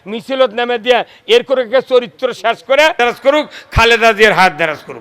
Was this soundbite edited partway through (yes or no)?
yes